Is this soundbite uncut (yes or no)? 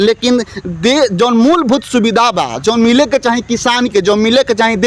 yes